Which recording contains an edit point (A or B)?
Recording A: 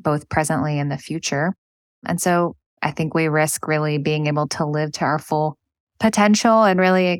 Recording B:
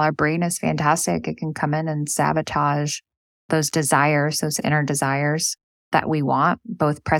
A